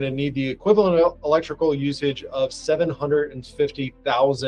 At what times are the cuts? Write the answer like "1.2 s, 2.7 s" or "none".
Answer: none